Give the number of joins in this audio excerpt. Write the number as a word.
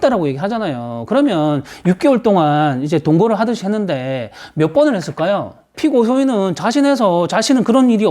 one